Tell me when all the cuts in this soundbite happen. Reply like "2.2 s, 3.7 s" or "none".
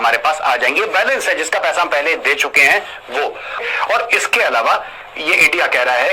3.6 s

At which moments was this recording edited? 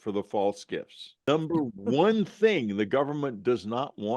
1.2 s

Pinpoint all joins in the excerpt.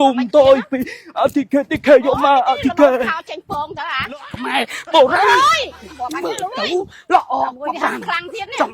4.3 s

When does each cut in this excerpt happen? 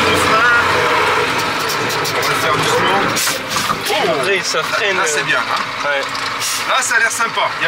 none

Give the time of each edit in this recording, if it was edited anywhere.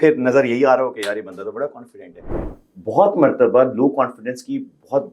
2.4 s

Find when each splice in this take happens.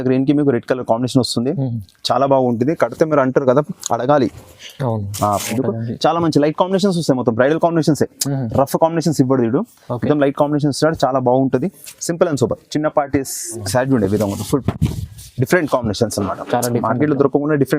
5.5 s, 13.6 s

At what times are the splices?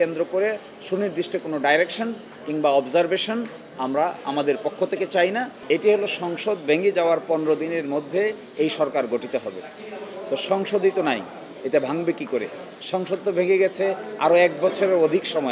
5.5 s

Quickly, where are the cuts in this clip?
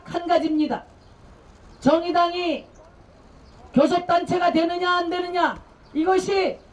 none

